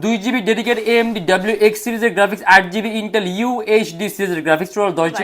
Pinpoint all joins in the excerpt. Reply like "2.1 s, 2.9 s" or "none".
none